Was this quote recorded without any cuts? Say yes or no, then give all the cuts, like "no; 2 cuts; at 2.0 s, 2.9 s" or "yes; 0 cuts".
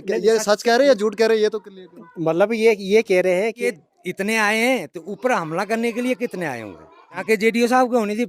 no; 2 cuts; at 3.8 s, 7.2 s